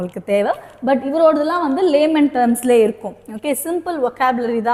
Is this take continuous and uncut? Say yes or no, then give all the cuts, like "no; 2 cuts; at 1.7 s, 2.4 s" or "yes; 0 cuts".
yes; 0 cuts